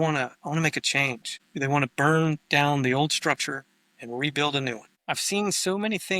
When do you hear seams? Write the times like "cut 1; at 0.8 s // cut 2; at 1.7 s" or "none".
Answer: cut 1; at 1.4 s // cut 2; at 4.9 s